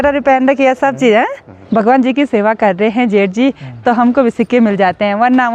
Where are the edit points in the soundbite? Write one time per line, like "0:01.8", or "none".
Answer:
0:01.6